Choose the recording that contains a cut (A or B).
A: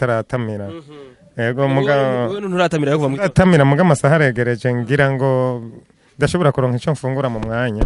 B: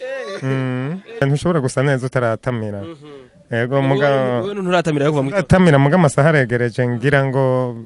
B